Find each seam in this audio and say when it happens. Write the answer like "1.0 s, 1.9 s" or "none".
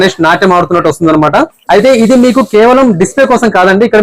1.6 s